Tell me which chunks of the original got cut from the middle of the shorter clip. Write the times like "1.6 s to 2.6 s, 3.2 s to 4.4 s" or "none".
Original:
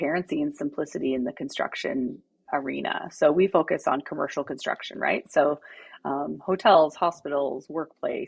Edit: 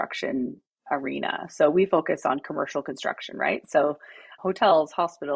5.9 s to 6.3 s